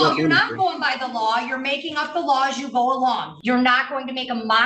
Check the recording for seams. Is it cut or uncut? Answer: cut